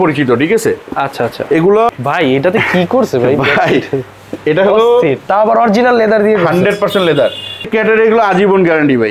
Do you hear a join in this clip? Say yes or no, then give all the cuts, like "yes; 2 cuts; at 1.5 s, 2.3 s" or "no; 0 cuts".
yes; 2 cuts; at 1.9 s, 7.7 s